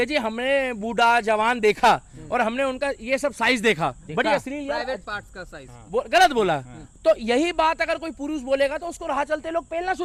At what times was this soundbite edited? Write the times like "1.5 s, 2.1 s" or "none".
none